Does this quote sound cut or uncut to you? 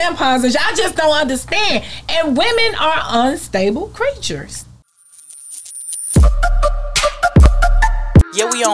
cut